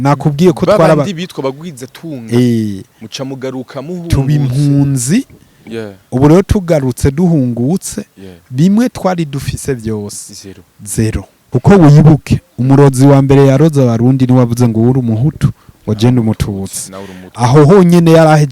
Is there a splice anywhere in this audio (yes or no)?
yes